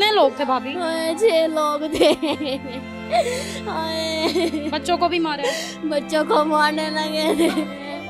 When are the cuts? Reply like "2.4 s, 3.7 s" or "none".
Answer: none